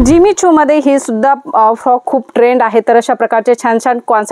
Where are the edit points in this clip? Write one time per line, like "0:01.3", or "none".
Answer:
none